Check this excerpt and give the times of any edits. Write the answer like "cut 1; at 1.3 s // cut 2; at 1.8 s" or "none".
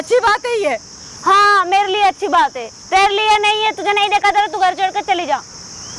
none